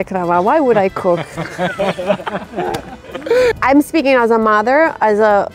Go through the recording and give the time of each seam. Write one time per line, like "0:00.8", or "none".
0:03.5